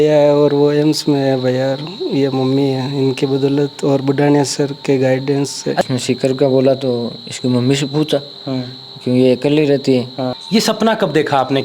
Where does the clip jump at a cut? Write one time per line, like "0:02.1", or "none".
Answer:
0:05.8
0:10.4